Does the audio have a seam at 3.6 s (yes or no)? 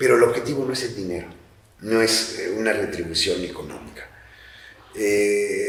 no